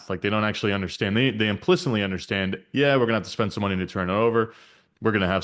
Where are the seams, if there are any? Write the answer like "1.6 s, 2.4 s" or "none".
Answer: none

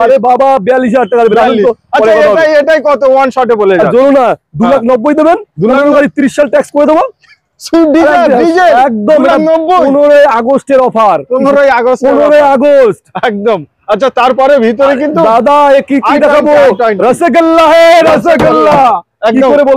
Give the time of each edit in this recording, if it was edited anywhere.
none

